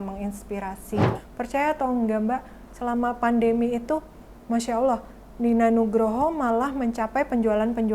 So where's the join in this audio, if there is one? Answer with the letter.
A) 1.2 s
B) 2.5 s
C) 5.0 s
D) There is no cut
A